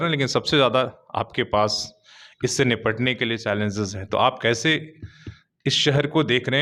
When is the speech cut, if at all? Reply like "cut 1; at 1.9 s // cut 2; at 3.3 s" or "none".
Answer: none